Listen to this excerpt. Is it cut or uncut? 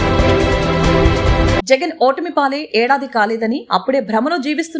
cut